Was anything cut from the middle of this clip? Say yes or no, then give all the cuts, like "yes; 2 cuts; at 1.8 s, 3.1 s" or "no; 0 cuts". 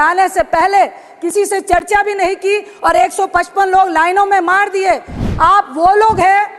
yes; 1 cut; at 5.1 s